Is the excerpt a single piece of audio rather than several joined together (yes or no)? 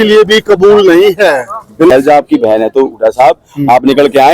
no